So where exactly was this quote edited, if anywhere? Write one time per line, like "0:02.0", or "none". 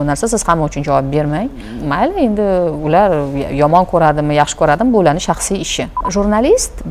0:01.7
0:06.0